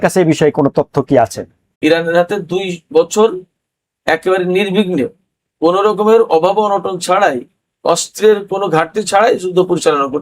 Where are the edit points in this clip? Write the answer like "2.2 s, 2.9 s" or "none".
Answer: 1.6 s